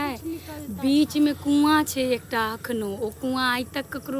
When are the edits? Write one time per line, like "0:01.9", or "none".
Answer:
none